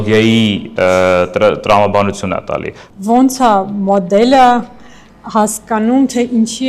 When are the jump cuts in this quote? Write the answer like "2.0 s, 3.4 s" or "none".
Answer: 2.8 s